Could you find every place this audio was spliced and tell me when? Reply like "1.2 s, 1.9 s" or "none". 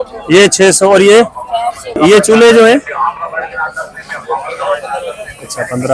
2.0 s